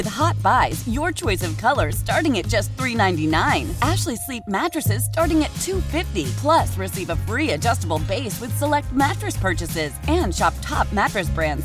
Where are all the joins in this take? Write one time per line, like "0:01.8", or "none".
none